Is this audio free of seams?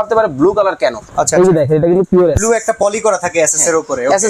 yes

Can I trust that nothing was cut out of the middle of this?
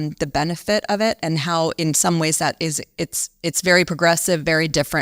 yes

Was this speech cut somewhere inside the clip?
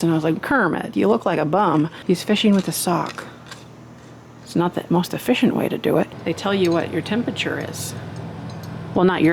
yes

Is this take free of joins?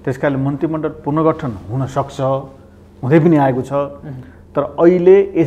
yes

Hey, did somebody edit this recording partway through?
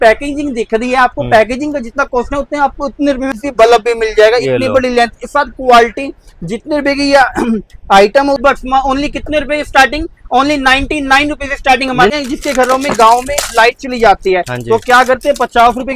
yes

